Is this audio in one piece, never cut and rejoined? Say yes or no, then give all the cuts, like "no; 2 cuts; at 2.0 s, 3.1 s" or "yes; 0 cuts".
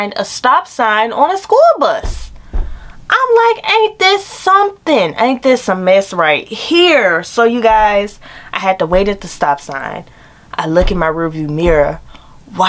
yes; 0 cuts